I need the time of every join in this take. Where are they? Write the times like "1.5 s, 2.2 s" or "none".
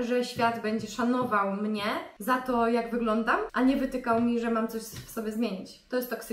2.1 s, 3.5 s